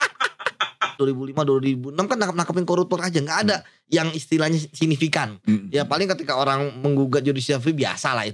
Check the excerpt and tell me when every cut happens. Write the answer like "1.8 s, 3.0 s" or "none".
1.0 s